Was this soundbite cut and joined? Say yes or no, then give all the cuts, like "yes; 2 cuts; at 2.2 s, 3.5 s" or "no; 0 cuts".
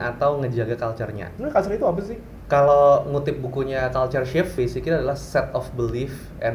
yes; 3 cuts; at 1.3 s, 2.2 s, 4.5 s